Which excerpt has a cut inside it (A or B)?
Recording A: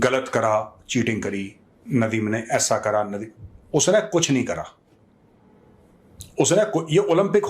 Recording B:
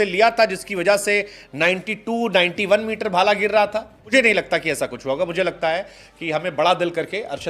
B